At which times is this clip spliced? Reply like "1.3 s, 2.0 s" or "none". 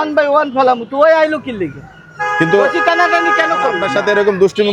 3.8 s

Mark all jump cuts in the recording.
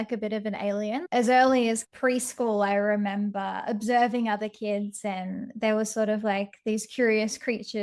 1.0 s, 1.9 s

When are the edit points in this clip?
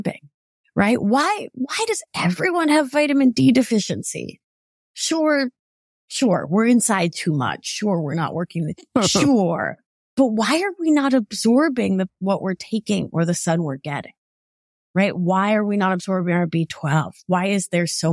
none

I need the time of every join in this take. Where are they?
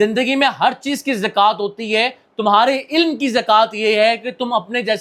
none

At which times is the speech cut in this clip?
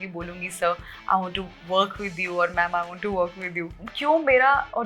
3.8 s

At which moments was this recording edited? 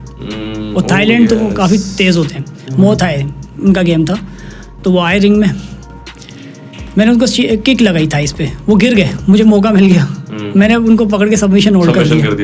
none

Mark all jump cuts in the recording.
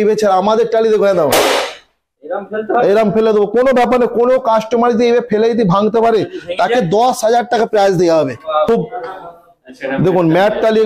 8.7 s

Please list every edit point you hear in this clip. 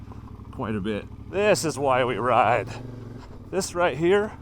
1.2 s

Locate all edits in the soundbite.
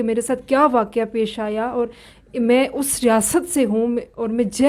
none

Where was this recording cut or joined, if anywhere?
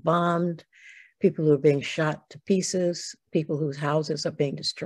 none

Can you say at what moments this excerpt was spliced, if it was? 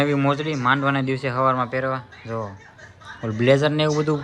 none

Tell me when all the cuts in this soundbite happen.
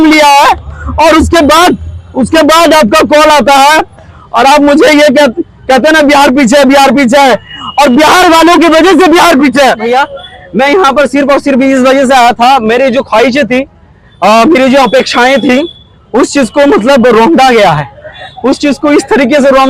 9.9 s

